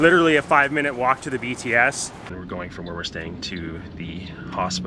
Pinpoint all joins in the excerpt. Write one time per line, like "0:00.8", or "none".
0:02.3